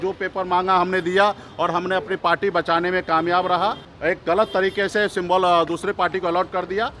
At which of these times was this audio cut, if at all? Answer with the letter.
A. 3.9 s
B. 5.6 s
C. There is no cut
A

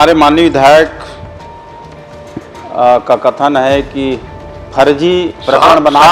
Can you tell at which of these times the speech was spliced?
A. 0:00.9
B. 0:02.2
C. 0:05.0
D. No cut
D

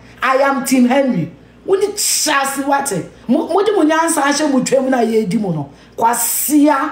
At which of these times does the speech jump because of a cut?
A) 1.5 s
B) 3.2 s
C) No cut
B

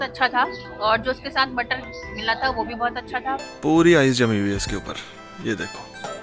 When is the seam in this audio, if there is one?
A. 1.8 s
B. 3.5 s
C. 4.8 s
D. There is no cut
B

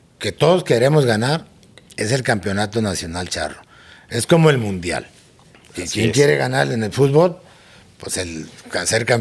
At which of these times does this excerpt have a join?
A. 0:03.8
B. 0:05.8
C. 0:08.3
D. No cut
D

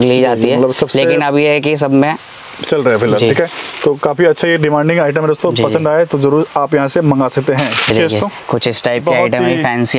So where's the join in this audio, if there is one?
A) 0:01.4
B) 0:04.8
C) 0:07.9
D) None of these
C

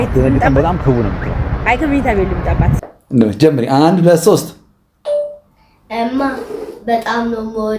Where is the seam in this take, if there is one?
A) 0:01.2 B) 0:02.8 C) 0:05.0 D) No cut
B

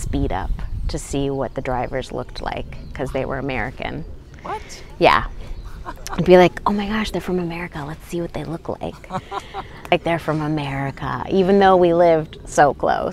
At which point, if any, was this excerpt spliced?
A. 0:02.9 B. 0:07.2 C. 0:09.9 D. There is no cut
C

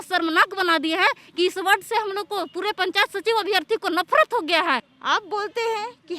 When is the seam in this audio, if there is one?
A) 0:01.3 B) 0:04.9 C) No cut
B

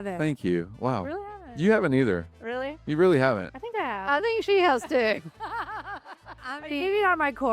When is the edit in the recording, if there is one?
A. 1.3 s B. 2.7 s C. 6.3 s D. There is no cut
C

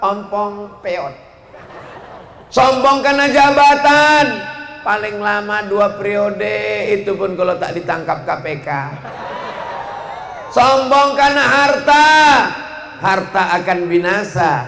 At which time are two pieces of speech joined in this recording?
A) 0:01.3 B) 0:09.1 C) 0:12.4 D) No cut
D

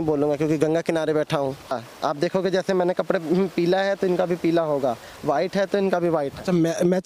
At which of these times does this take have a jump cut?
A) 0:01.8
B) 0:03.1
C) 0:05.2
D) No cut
A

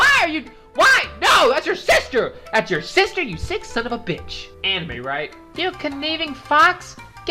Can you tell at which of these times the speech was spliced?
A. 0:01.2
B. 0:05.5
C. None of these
B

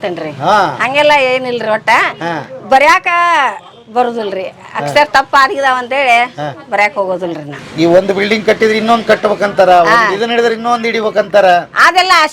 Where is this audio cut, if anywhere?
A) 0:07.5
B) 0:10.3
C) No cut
A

